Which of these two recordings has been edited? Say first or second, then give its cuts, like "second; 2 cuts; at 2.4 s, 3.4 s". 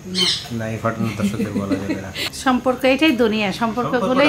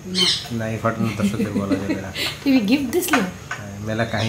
first; 1 cut; at 2.3 s